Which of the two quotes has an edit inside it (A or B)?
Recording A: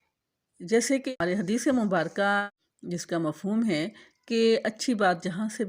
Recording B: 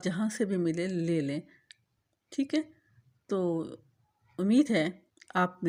A